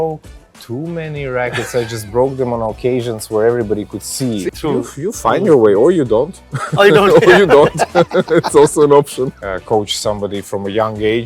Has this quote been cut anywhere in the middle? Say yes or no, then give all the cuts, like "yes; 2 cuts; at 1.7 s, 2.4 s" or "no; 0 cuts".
yes; 2 cuts; at 4.5 s, 9.4 s